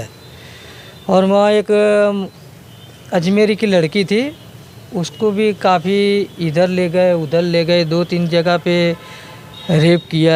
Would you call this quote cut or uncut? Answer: uncut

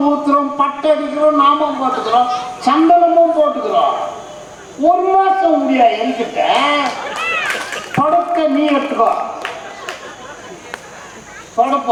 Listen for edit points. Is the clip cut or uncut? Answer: uncut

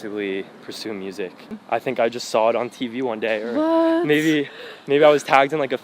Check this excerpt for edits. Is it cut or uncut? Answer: cut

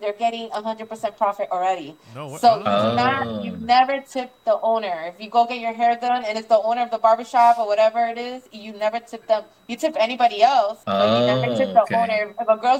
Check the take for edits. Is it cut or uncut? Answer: cut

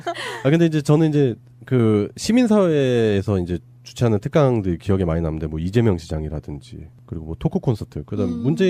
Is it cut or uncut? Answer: cut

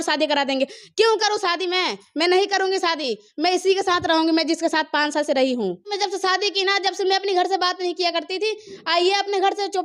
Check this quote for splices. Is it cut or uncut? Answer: cut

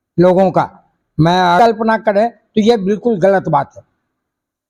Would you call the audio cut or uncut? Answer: cut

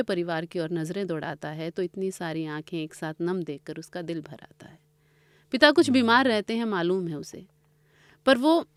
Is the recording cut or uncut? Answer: uncut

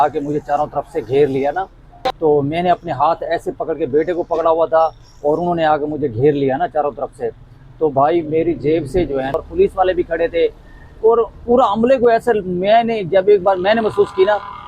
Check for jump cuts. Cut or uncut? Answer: cut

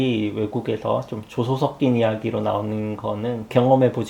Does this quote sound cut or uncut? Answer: uncut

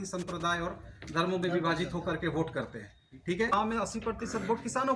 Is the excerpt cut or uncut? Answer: cut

